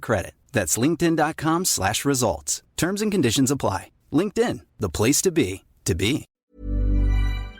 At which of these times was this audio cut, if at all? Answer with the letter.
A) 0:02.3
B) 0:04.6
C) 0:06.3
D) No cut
C